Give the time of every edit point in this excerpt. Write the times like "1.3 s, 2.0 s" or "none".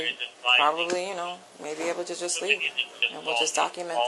none